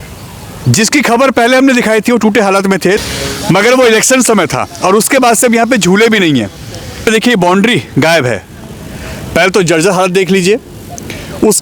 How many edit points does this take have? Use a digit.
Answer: 2